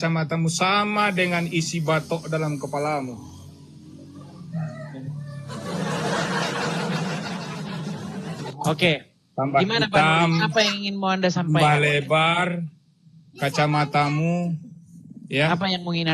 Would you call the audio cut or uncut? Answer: uncut